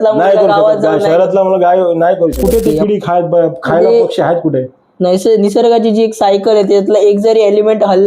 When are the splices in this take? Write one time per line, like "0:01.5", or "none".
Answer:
0:02.4